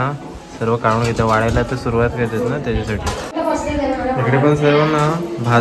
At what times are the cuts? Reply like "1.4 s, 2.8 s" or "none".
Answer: none

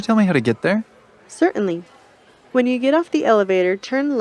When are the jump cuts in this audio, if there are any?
1.0 s

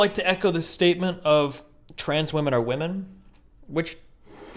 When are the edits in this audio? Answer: none

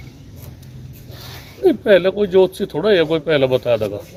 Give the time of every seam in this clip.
none

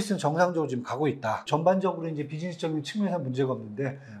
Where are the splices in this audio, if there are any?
1.4 s

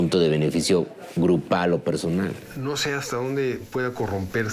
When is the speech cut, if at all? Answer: 2.5 s

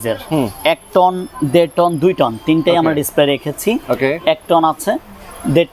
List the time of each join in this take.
none

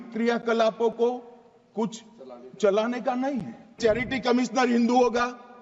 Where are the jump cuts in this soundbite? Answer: 3.8 s

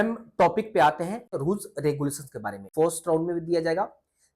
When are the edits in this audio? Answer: 1.3 s, 2.6 s

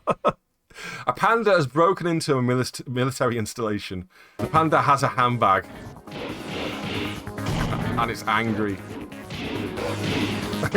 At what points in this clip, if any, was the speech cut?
4.4 s

